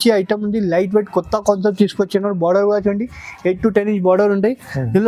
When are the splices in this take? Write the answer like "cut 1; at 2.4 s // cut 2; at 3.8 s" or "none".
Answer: none